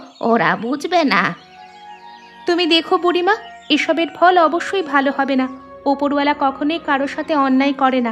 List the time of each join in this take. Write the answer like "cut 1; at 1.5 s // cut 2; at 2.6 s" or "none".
none